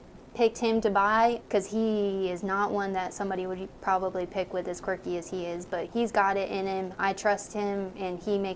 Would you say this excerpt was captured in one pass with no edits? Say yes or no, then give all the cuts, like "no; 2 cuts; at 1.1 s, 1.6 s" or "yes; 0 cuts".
no; 2 cuts; at 1.4 s, 5.9 s